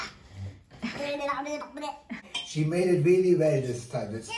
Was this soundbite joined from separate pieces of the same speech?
yes; 1 cut; at 2.2 s

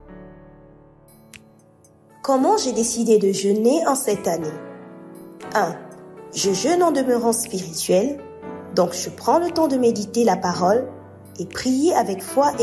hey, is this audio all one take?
no; 1 cut; at 1.0 s

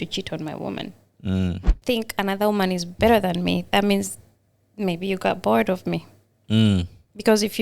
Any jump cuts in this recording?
yes; 1 cut; at 1.7 s

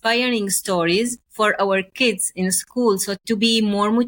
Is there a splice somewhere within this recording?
yes; 2 cuts; at 1.2 s, 3.2 s

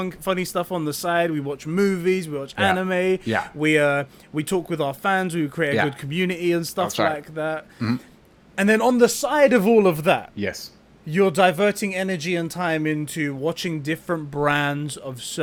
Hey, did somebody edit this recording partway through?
no; 0 cuts

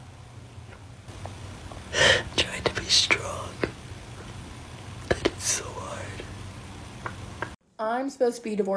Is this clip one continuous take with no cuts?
no; 2 cuts; at 1.1 s, 7.6 s

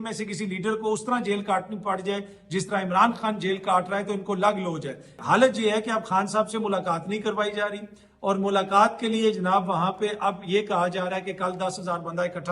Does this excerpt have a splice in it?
yes; 1 cut; at 5.2 s

